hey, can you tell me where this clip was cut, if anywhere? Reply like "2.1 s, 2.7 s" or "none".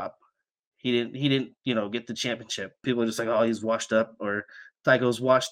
2.8 s